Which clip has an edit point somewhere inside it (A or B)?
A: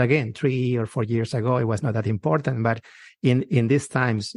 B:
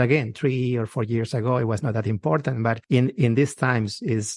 B